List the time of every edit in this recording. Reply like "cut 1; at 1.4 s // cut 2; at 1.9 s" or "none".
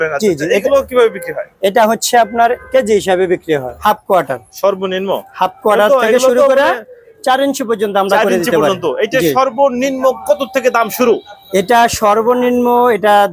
cut 1; at 3.8 s